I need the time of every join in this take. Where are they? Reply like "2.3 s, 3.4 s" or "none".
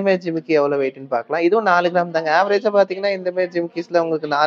none

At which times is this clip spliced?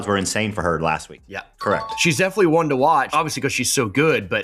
1.2 s

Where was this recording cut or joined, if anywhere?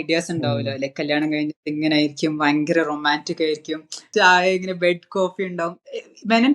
4.0 s

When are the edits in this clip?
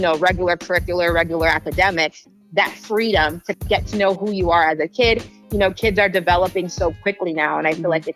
3.6 s

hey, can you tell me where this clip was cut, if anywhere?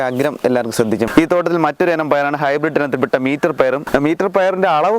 1.1 s, 3.9 s

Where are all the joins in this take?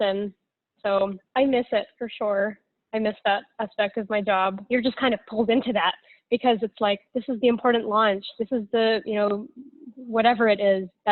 4.6 s

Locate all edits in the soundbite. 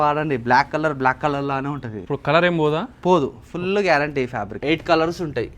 1.9 s, 4.5 s

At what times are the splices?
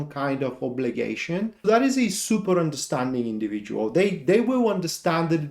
1.6 s

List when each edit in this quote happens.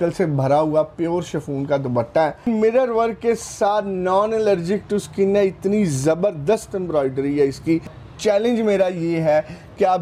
2.4 s, 7.9 s

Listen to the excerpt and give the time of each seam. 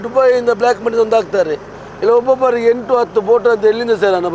1.8 s

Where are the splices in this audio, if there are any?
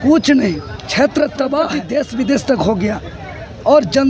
1.8 s

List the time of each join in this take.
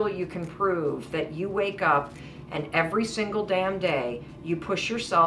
none

